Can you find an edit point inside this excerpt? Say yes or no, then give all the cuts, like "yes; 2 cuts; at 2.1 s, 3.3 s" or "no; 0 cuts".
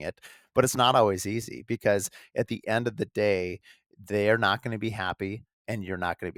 no; 0 cuts